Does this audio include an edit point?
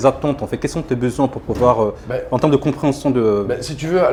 no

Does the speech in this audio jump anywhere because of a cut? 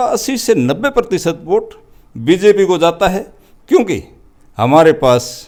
no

